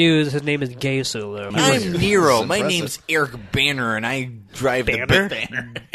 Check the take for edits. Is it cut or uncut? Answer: cut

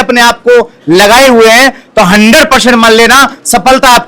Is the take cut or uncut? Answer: uncut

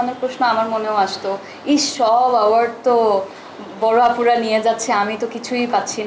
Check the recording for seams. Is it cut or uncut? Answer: uncut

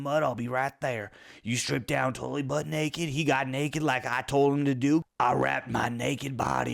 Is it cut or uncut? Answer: cut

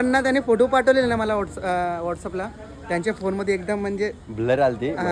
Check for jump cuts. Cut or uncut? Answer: uncut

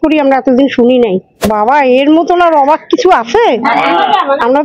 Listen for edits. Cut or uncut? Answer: cut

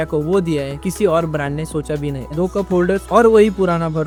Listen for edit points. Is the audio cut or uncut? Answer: uncut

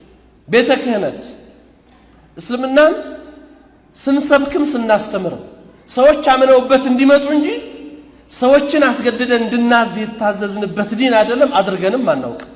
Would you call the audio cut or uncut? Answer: uncut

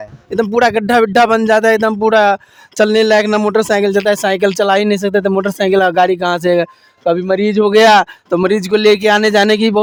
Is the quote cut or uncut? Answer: uncut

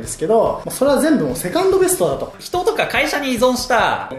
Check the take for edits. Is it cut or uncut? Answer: cut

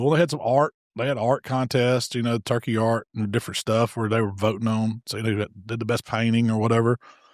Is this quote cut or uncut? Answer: uncut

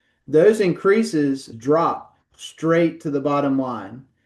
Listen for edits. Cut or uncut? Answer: cut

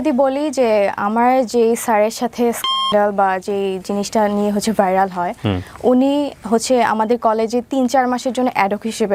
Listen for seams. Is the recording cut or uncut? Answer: uncut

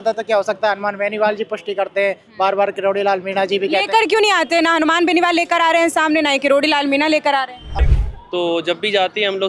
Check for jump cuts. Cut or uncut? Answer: cut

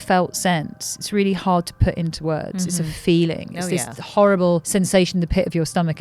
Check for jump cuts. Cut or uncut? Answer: cut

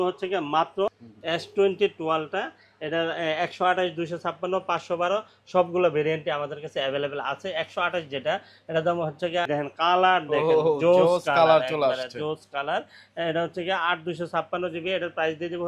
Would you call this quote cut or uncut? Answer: cut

